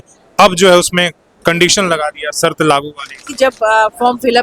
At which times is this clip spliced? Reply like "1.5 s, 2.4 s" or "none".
3.3 s